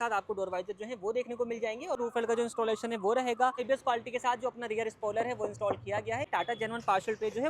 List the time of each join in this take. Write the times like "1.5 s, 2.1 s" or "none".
2.0 s, 3.6 s, 6.3 s